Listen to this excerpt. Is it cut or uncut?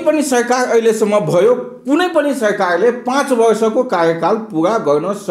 uncut